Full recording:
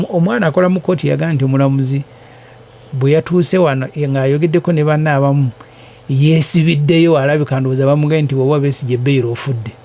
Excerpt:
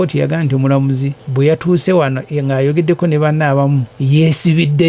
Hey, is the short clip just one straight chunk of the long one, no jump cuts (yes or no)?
no